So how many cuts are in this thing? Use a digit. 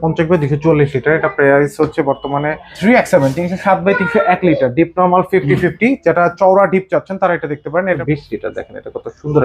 2